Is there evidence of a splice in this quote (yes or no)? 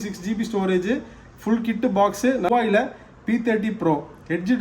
yes